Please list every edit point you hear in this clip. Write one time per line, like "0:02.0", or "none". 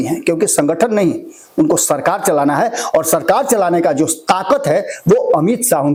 none